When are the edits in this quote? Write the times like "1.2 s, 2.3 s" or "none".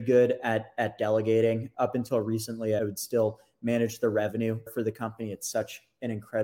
1.7 s, 2.8 s, 4.7 s